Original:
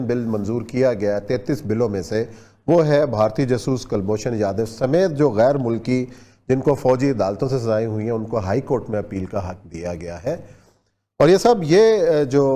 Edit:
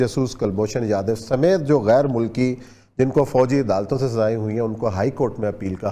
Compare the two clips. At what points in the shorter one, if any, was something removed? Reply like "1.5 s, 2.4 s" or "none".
none